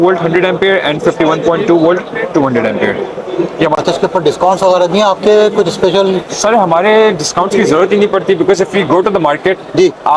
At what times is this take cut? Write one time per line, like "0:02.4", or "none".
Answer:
0:03.8